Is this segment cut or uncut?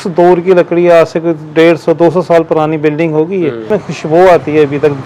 cut